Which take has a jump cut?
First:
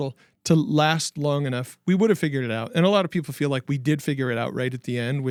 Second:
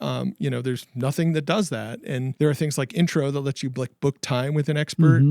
second; 1 cut; at 2.3 s

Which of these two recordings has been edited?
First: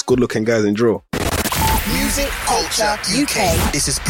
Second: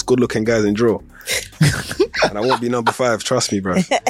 first; 1 cut; at 1.1 s

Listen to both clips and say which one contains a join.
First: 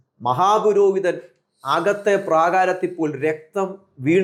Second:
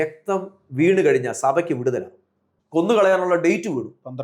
second; 1 cut; at 2.8 s

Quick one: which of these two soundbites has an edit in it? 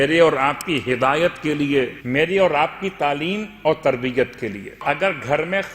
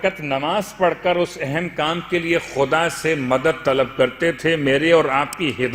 first; 2 cuts; at 2.0 s, 4.8 s

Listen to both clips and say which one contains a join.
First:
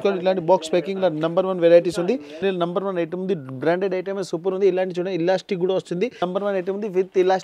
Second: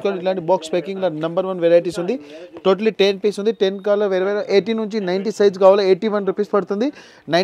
first; 2 cuts; at 2.4 s, 6.2 s

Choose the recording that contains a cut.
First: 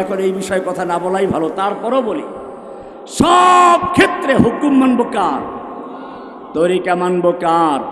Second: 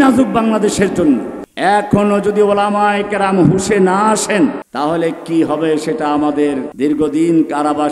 second; 3 cuts; at 1.4 s, 4.6 s, 6.7 s

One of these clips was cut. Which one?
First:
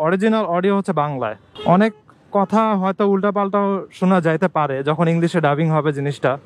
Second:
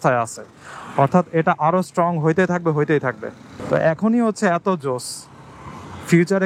first; 1 cut; at 1.5 s

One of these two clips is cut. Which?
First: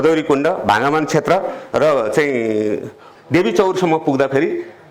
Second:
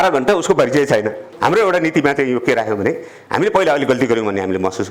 second; 1 cut; at 1.2 s

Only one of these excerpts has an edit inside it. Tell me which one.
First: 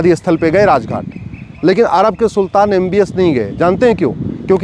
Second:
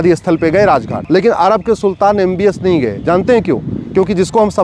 second; 1 cut; at 1.0 s

